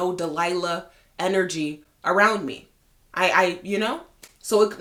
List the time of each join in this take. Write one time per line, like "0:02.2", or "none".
none

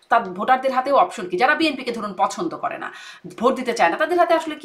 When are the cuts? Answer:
none

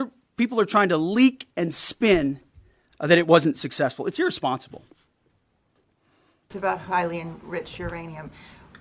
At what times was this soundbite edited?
0:06.5

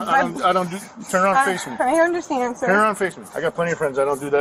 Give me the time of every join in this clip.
0:03.2

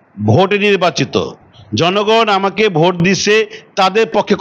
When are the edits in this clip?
none

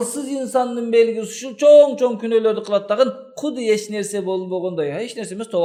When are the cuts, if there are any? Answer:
none

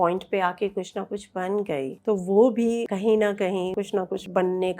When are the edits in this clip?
0:01.9
0:02.9
0:03.7

